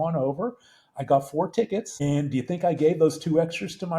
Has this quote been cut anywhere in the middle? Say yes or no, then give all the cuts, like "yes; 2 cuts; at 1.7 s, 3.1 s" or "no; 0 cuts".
yes; 1 cut; at 1.9 s